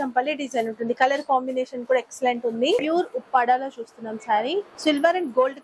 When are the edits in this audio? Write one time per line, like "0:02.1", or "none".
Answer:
0:02.8
0:04.7